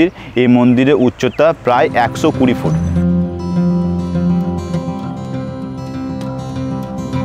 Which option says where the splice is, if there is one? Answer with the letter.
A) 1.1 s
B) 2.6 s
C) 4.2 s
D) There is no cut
B